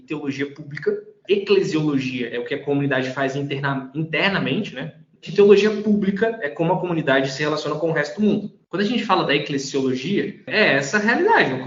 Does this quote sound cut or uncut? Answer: cut